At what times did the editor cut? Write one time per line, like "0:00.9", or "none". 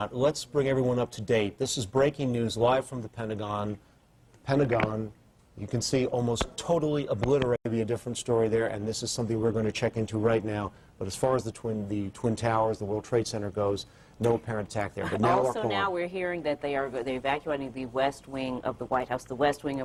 none

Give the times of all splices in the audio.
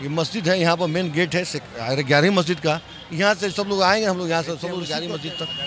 0:04.7

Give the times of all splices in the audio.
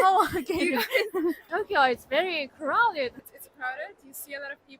0:01.4
0:03.2

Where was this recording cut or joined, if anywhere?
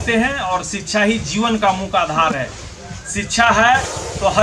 none

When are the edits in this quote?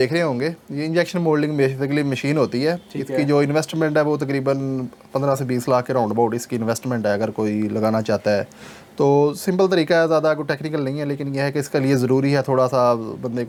none

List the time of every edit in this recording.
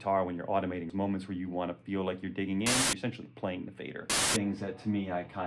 0:00.9
0:02.8
0:04.1

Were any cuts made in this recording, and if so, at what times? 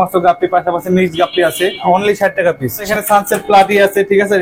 0:01.8
0:02.8

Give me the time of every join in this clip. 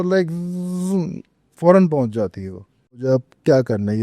0:03.0

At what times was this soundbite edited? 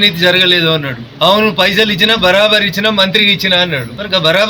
none

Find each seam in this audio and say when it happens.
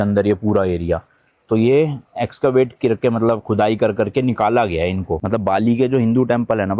0:05.2

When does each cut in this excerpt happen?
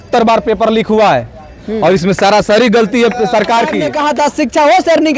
0:03.9

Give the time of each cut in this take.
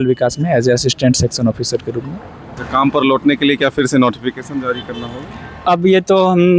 0:02.5

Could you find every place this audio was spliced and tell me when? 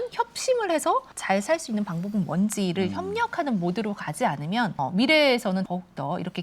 0:01.1
0:04.7
0:05.7

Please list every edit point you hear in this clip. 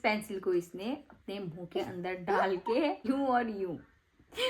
0:03.1

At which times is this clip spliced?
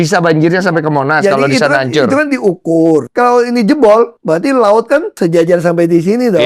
0:03.1
0:04.2
0:05.1

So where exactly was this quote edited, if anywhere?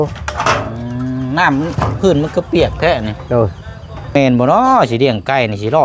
0:04.1

